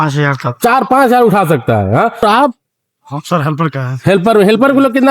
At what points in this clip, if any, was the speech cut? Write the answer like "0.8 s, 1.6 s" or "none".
2.1 s